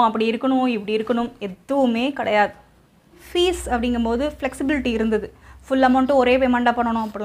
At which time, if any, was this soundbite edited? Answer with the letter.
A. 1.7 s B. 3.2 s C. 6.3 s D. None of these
B